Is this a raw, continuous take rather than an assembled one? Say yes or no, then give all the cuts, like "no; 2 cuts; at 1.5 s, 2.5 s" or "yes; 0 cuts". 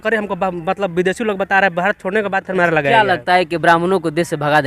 no; 1 cut; at 2.5 s